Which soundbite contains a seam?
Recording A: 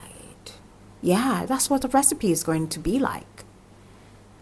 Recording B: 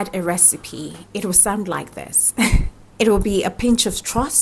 B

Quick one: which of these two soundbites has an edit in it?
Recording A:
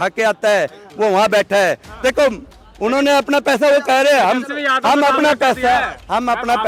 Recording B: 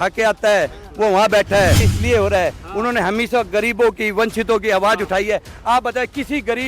B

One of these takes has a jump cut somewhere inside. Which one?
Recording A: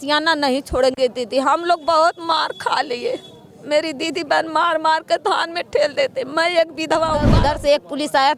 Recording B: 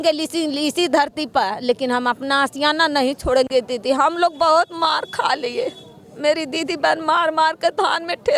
A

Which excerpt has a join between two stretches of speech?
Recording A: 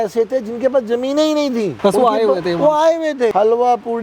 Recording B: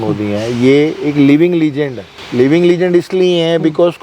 A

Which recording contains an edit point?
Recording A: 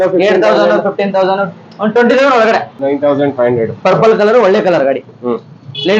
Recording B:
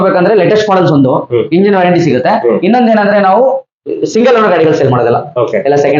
A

